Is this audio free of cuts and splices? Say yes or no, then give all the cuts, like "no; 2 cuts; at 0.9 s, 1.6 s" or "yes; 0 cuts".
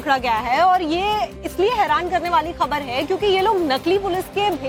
yes; 0 cuts